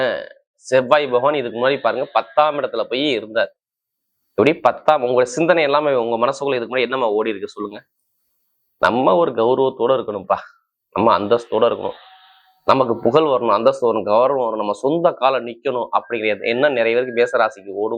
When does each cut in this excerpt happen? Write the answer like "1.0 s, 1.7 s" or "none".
none